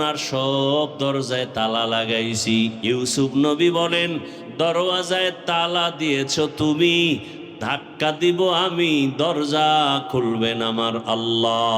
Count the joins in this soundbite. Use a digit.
1